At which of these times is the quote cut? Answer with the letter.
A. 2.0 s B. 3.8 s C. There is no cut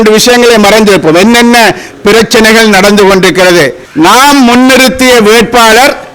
B